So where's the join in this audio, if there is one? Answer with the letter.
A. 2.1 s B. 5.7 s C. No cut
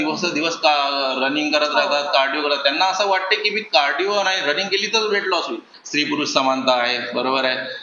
B